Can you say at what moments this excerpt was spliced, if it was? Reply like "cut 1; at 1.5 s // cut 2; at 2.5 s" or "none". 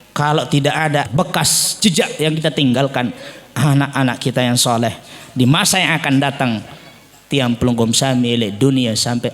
cut 1; at 1.1 s